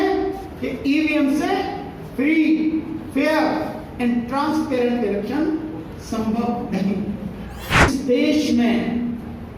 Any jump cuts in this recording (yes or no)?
yes